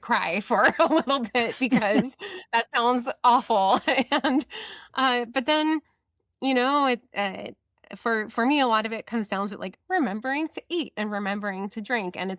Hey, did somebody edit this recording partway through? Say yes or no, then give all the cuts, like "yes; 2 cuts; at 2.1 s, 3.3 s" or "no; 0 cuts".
no; 0 cuts